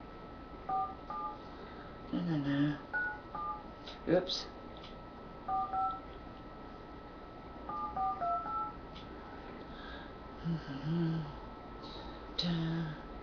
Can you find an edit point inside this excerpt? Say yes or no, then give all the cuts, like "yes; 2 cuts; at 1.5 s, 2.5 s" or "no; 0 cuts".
no; 0 cuts